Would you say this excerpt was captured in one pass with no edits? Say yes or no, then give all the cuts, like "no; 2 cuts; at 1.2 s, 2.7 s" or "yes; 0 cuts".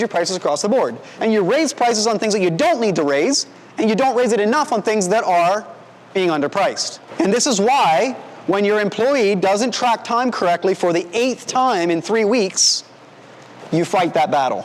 no; 1 cut; at 7.1 s